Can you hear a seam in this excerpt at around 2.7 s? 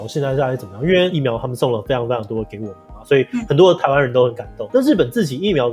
no; 1 cut; at 1.1 s

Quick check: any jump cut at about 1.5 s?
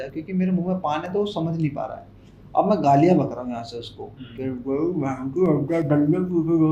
no; 0 cuts

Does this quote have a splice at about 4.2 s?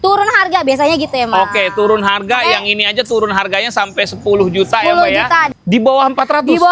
no; 1 cut; at 5.5 s

